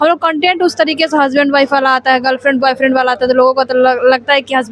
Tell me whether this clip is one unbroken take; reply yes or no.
yes